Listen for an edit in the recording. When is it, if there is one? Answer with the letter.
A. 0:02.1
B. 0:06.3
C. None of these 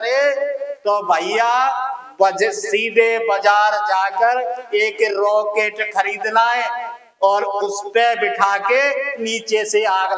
C